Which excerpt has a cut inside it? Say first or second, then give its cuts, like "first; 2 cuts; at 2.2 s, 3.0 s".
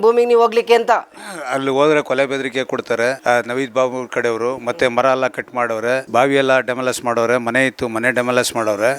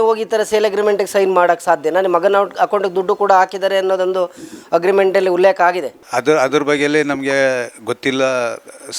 first; 1 cut; at 6.0 s